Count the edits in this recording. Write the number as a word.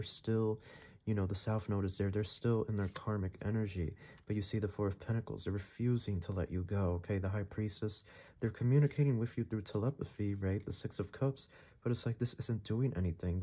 zero